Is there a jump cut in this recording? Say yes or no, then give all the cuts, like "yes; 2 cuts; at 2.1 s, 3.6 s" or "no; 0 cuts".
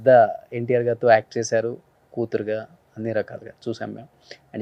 no; 0 cuts